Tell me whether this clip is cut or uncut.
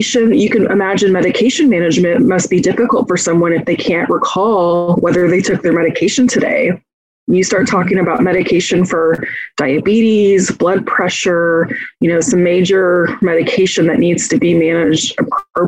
uncut